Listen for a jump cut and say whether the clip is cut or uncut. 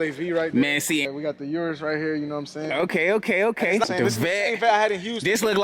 cut